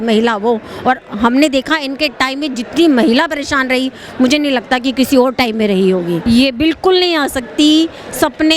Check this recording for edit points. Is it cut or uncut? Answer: cut